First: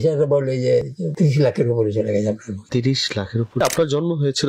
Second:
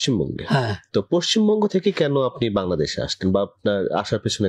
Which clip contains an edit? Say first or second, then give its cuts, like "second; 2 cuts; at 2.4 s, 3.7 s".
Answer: first; 3 cuts; at 1.0 s, 2.5 s, 3.6 s